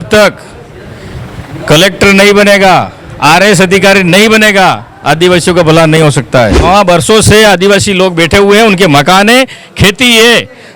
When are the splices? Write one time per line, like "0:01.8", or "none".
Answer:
0:06.6